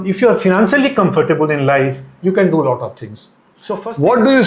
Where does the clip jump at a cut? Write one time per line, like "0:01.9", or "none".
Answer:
0:03.5